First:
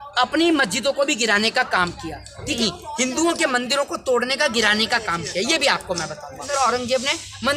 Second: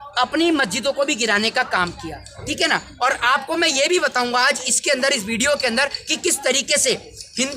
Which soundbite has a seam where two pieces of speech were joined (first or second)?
first